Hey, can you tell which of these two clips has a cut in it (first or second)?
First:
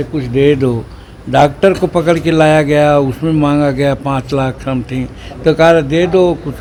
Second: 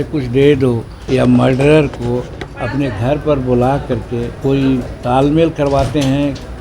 second